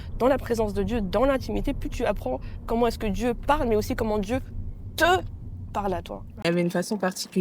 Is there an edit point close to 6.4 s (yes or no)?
yes